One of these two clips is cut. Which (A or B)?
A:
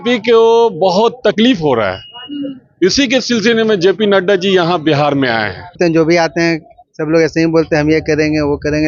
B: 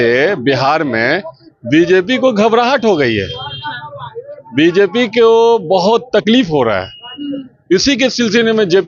A